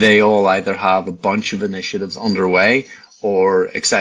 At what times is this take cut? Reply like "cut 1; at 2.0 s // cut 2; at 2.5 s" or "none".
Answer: none